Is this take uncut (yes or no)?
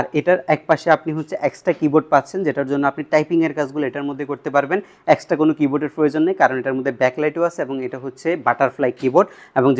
yes